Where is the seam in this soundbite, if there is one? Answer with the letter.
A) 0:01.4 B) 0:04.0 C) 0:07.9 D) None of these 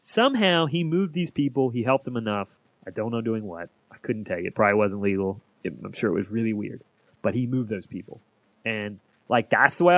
D